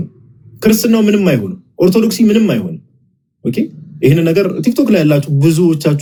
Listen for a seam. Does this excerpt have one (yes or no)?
no